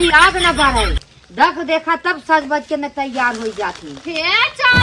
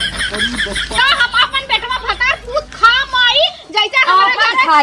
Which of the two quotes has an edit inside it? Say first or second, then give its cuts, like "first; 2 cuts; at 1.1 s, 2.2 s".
second; 1 cut; at 1.0 s